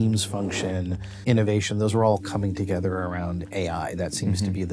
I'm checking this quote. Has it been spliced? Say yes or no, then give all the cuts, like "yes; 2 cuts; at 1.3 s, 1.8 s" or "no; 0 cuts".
yes; 1 cut; at 1.0 s